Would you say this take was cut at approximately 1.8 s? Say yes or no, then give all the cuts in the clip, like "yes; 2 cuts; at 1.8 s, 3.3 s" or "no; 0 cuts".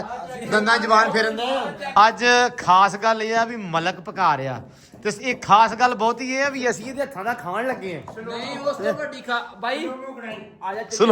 yes; 1 cut; at 1.8 s